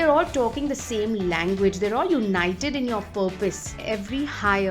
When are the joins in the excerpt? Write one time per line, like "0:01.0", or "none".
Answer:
0:03.7